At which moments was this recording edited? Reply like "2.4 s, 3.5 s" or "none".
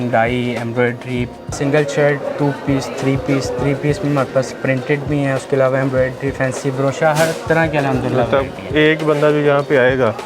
1.6 s